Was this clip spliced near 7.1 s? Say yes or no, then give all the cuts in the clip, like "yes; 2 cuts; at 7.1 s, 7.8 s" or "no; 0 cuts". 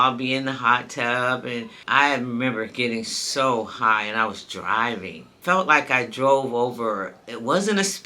no; 2 cuts; at 1.8 s, 5.3 s